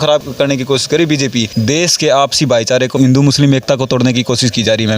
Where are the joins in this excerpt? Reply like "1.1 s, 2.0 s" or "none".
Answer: 1.6 s

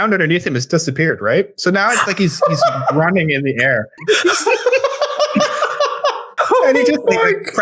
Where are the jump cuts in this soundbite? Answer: 3.9 s, 6.3 s

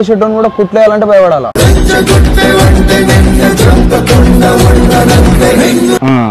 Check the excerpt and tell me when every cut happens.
1.5 s

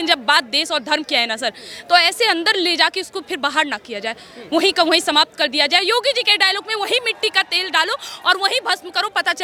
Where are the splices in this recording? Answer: none

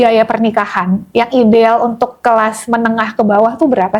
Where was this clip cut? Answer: none

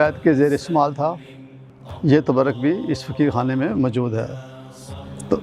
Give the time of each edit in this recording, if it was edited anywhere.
none

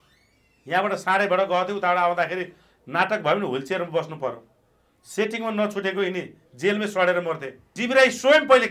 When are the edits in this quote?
7.7 s

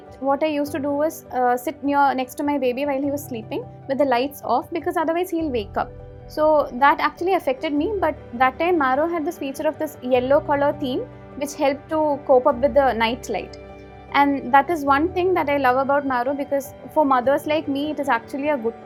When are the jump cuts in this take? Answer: none

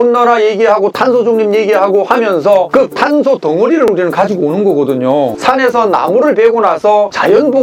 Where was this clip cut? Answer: 5.3 s

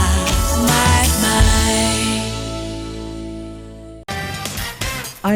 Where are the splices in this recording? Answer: 4.0 s

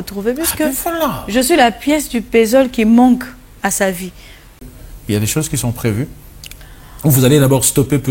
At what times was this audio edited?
4.6 s

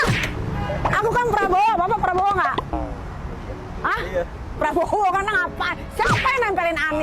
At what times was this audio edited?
none

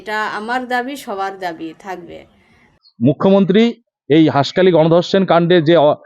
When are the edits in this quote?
2.8 s

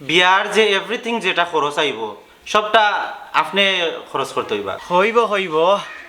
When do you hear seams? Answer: 4.8 s

